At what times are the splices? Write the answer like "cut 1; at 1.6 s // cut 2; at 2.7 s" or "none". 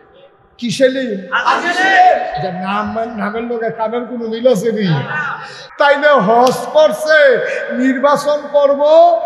cut 1; at 5.6 s

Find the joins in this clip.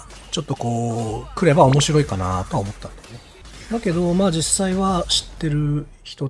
none

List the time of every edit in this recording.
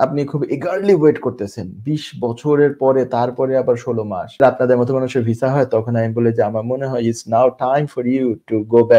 cut 1; at 4.4 s

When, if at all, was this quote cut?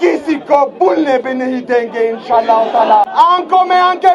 cut 1; at 3.1 s

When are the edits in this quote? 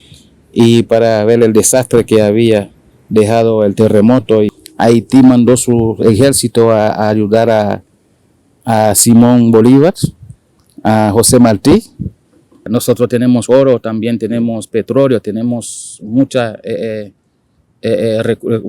cut 1; at 4.5 s // cut 2; at 12.6 s

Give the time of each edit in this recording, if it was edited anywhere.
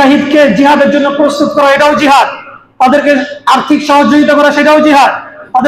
none

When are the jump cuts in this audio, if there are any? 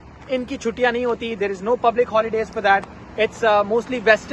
none

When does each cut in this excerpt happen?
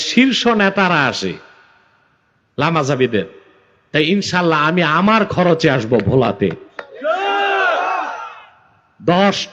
none

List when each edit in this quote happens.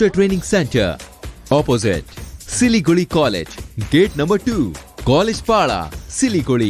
none

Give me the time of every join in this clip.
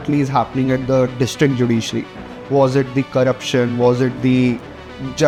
none

